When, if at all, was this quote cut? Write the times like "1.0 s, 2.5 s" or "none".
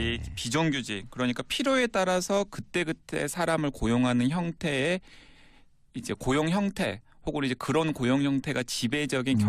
4.5 s